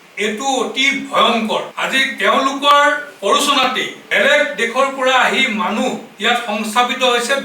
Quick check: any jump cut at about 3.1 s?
yes; 4 cuts; at 1.7 s, 3.1 s, 4.0 s, 6.1 s

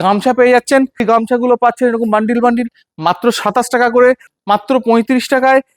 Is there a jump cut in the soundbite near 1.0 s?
yes; 2 cuts; at 1.0 s, 4.3 s

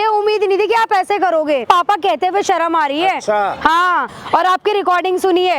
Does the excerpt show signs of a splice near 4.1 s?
yes; 2 cuts; at 1.6 s, 4.1 s

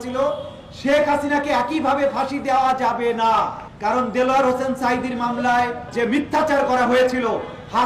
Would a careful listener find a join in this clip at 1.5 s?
no; 2 cuts; at 3.7 s, 5.8 s

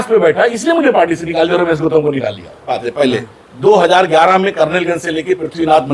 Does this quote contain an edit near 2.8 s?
yes; 1 cut; at 2.8 s

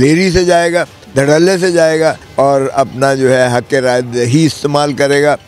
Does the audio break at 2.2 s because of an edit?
yes; 2 cuts; at 1.0 s, 2.2 s

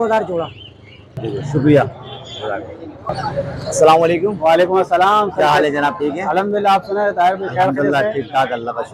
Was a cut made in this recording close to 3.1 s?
no; 1 cut; at 1.2 s

